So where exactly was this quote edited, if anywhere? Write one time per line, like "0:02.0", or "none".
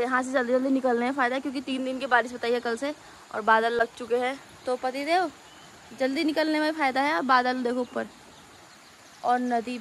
none